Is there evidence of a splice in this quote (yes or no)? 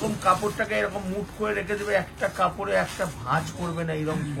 no